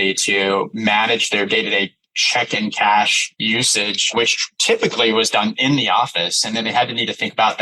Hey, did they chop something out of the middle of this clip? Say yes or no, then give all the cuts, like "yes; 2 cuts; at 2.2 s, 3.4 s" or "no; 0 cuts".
yes; 1 cut; at 4.5 s